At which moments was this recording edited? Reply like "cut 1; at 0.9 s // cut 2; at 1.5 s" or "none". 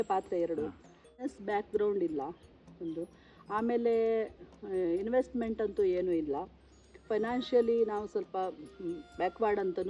cut 1; at 1.3 s